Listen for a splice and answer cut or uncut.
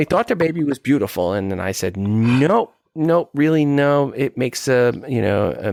uncut